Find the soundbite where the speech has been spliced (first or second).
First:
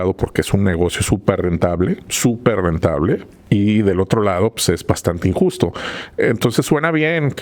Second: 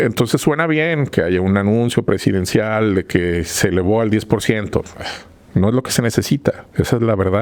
first